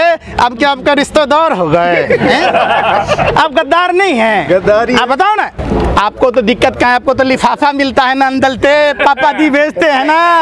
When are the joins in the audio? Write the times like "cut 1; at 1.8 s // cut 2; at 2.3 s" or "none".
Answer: cut 1; at 5.6 s